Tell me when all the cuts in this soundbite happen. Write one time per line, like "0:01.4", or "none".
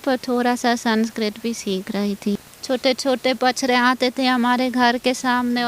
0:02.3